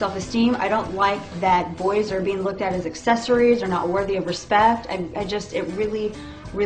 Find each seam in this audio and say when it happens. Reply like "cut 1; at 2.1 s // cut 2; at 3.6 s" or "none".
none